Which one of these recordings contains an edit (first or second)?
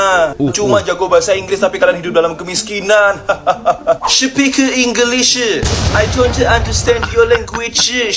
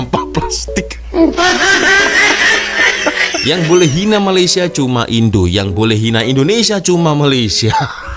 second